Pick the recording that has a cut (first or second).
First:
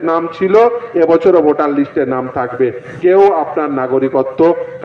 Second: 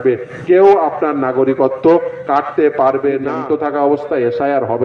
second